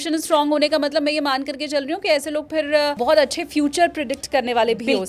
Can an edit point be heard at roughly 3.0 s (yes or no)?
yes